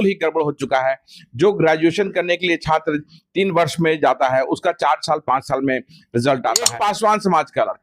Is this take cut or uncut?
cut